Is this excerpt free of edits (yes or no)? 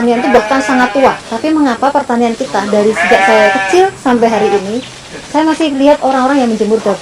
no